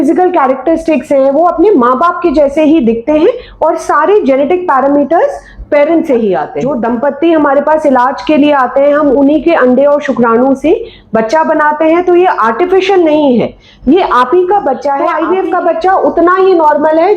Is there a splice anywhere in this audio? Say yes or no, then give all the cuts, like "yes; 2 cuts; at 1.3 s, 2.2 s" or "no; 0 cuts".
yes; 2 cuts; at 6.6 s, 15.1 s